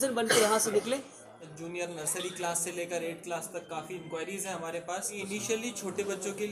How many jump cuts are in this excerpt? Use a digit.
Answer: 2